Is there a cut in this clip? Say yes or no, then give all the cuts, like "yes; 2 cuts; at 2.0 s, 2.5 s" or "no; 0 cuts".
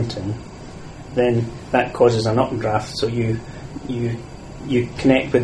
no; 0 cuts